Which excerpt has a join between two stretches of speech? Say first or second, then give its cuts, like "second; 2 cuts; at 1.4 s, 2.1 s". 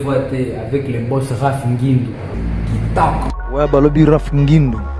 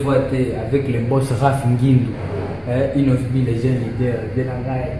first; 2 cuts; at 2.3 s, 3.3 s